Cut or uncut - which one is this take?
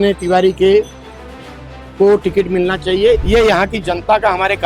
cut